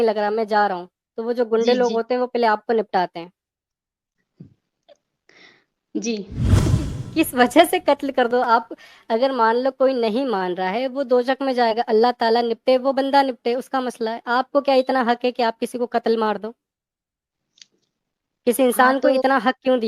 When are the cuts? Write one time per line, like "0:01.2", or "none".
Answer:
0:06.7